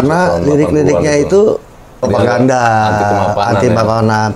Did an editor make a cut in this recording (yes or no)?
yes